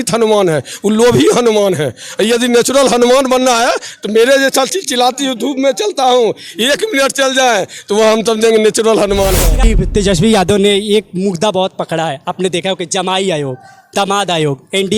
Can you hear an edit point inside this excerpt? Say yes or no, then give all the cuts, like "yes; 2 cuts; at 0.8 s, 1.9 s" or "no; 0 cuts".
yes; 1 cut; at 9.6 s